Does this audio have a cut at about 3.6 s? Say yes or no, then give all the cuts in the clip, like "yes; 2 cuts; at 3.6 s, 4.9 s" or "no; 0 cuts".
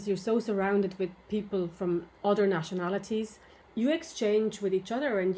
yes; 2 cuts; at 2.1 s, 3.6 s